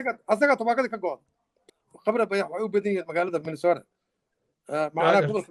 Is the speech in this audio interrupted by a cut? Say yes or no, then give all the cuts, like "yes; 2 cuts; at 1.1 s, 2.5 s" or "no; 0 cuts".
yes; 1 cut; at 1.6 s